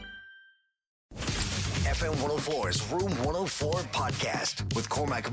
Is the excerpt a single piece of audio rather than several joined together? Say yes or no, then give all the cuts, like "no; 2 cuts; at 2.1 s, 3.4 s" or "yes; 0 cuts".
no; 1 cut; at 1.2 s